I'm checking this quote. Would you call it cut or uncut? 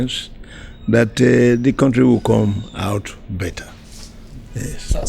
uncut